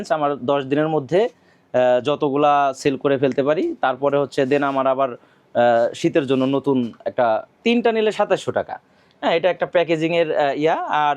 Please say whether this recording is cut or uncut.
cut